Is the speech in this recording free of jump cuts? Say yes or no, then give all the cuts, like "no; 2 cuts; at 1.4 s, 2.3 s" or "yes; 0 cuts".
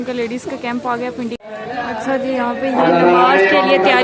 no; 1 cut; at 1.4 s